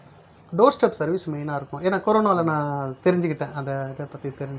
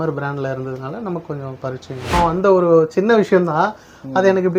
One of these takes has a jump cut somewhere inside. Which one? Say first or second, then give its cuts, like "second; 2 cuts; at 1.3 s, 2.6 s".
second; 1 cut; at 2.1 s